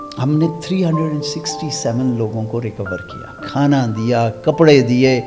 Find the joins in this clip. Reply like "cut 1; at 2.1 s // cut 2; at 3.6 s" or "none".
cut 1; at 3.4 s